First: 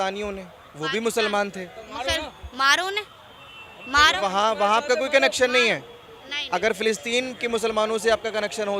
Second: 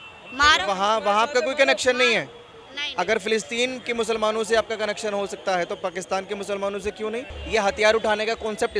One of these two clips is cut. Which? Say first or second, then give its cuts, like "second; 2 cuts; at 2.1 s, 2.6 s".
second; 1 cut; at 7.4 s